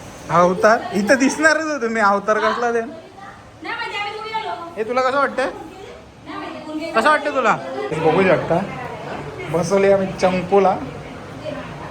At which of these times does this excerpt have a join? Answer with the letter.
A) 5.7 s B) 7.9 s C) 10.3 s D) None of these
B